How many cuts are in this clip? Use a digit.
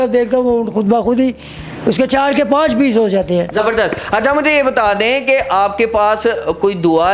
0